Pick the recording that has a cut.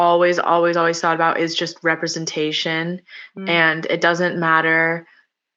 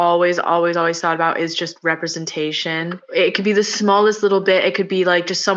second; 1 cut; at 3.0 s

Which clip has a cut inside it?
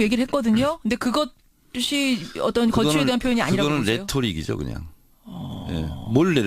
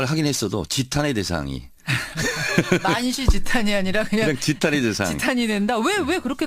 first; 1 cut; at 1.8 s

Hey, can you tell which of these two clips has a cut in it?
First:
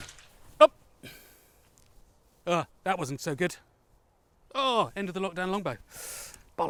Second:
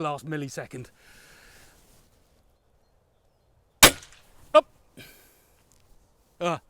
second; 1 cut; at 2.6 s

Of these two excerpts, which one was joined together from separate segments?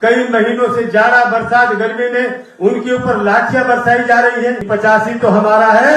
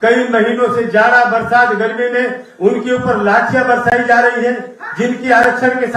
first; 1 cut; at 4.6 s

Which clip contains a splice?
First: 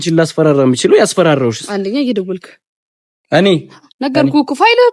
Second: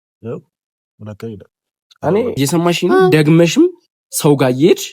second; 1 cut; at 2.4 s

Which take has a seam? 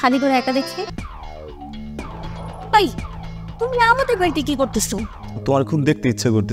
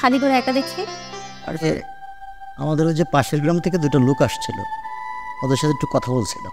first; 1 cut; at 0.9 s

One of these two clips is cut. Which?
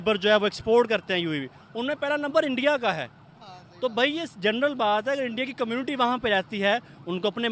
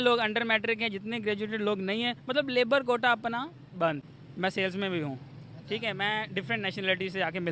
second; 1 cut; at 4.2 s

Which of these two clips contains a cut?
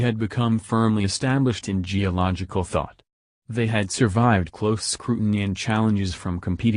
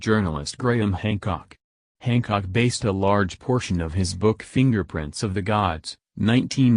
first; 1 cut; at 3.9 s

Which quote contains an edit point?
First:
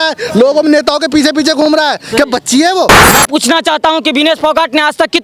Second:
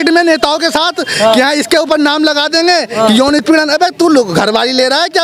first; 1 cut; at 3.1 s

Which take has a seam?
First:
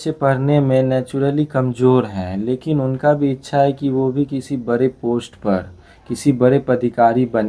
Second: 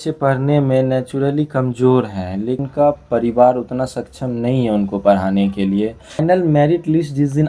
second; 2 cuts; at 2.6 s, 6.2 s

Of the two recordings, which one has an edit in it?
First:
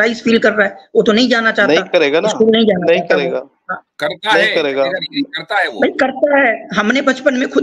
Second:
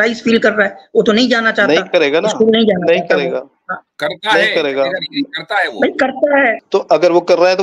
second; 1 cut; at 6.6 s

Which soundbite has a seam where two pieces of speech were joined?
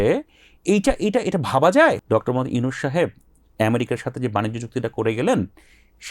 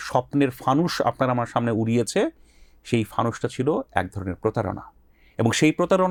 first; 1 cut; at 2.0 s

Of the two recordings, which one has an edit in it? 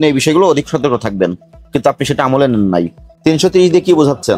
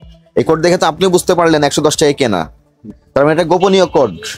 first; 1 cut; at 3.0 s

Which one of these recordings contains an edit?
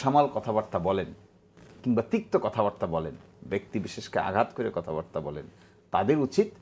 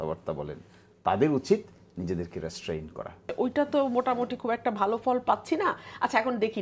second; 1 cut; at 3.3 s

